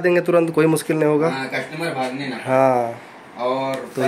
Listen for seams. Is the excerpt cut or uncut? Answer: uncut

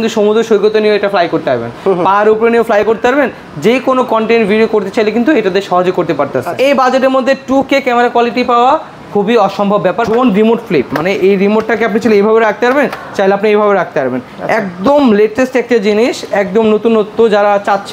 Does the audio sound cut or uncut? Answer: cut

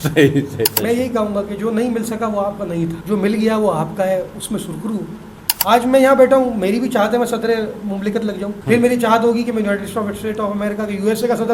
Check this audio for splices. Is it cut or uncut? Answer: cut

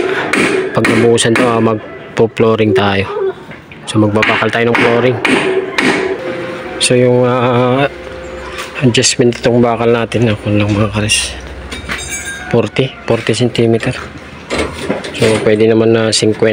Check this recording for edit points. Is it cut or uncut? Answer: cut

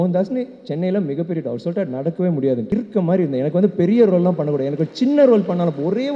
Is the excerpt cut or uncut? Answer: cut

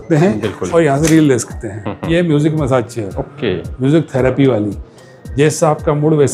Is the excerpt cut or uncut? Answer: cut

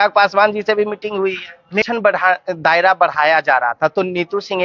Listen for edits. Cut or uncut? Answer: cut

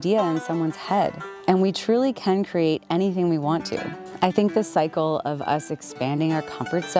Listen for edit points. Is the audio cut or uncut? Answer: uncut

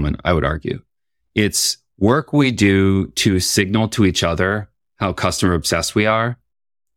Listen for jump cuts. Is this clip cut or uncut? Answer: uncut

